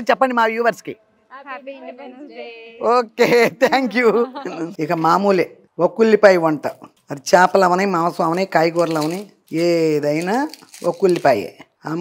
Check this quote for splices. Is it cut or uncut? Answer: cut